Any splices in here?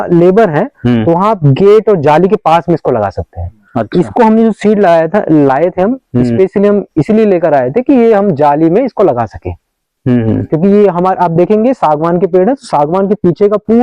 no; 0 cuts

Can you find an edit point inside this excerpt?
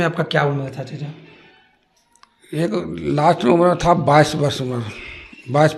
no; 0 cuts

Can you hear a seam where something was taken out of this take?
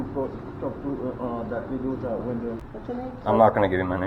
yes; 1 cut; at 2.6 s

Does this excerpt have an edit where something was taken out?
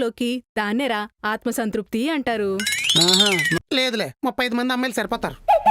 yes; 1 cut; at 3.6 s

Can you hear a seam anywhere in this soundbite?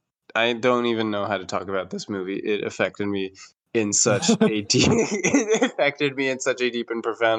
no; 0 cuts

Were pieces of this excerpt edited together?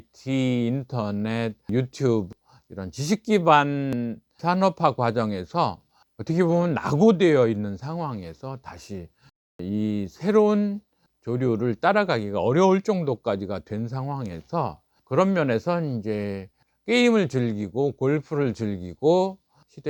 no; 0 cuts

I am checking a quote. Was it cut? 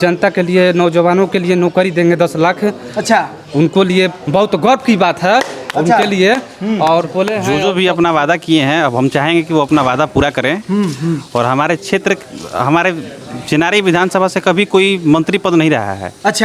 yes; 1 cut; at 7.5 s

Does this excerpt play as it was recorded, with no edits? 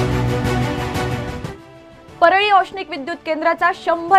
no; 1 cut; at 1.4 s

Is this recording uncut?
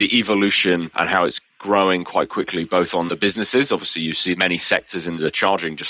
no; 3 cuts; at 0.9 s, 3.1 s, 4.4 s

